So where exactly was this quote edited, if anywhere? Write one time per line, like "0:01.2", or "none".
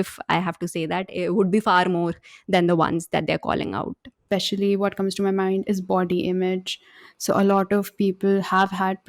0:03.9